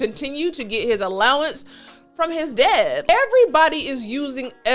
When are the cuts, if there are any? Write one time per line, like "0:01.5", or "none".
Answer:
0:03.0

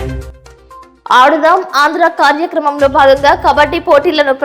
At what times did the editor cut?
0:00.9

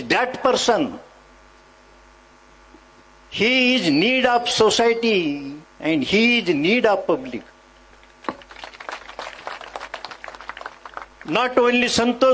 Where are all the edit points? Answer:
none

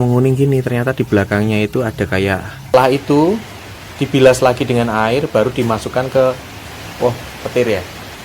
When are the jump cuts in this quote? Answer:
0:02.7

